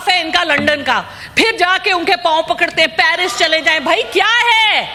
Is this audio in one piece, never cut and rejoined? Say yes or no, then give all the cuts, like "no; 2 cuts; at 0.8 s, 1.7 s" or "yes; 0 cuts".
yes; 0 cuts